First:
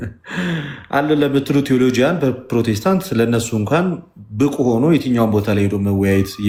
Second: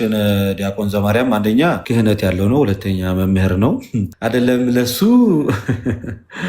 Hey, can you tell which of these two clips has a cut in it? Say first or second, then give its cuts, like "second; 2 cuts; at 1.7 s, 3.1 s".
second; 2 cuts; at 1.8 s, 4.1 s